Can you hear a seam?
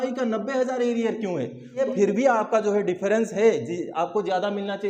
yes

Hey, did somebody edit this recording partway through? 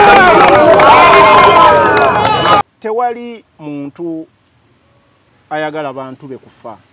yes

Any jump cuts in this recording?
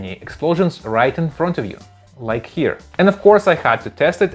yes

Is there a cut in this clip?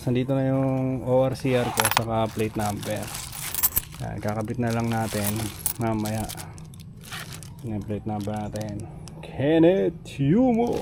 no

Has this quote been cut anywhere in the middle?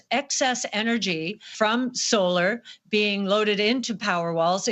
yes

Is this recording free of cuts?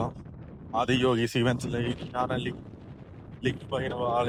yes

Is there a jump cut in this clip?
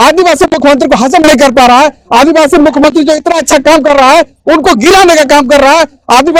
no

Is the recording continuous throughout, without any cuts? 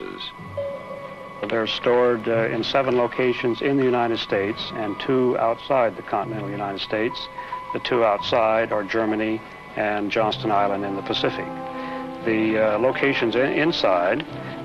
yes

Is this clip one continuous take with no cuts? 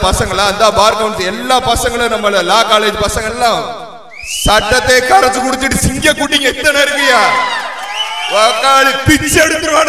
yes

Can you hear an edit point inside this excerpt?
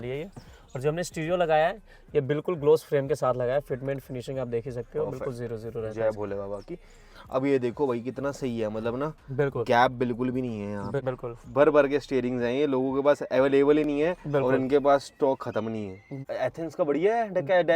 yes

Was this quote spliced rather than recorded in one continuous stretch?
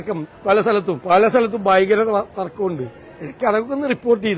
yes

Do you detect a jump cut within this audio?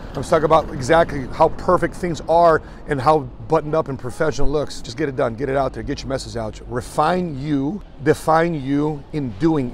yes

